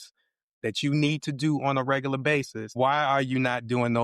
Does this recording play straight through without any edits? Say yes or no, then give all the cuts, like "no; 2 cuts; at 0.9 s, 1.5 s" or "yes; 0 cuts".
no; 1 cut; at 2.6 s